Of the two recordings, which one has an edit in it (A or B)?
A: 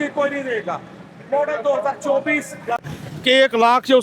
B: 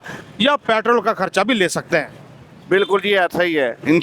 A